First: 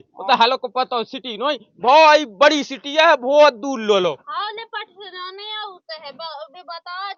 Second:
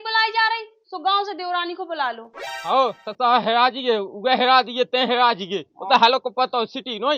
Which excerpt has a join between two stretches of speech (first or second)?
second